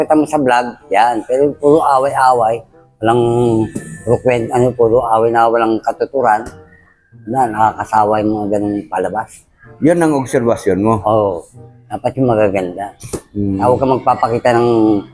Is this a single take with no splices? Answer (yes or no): yes